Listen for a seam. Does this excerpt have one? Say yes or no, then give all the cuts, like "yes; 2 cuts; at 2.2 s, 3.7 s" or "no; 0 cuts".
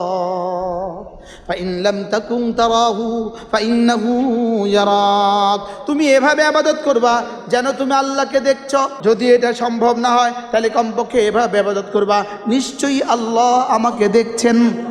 yes; 1 cut; at 8.9 s